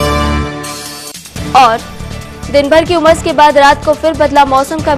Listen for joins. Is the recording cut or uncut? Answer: uncut